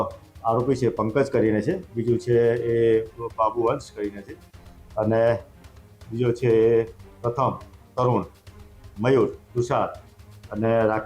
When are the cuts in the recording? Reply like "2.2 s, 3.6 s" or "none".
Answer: none